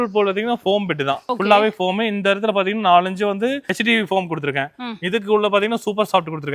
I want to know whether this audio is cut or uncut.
uncut